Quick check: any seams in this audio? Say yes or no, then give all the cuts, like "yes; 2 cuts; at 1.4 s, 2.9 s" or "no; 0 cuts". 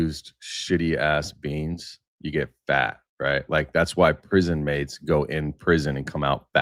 no; 0 cuts